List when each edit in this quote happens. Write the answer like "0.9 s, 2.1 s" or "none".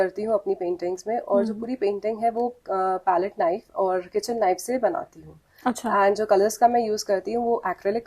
none